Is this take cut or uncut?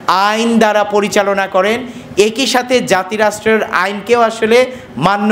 uncut